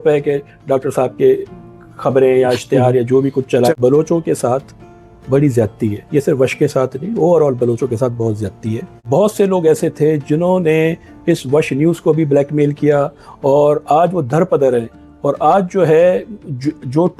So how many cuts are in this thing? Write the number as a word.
two